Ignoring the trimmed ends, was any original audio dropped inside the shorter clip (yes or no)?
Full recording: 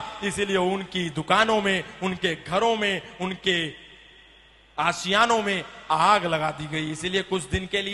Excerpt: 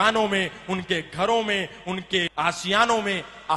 yes